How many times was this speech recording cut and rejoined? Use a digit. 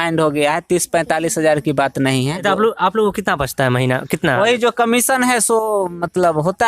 1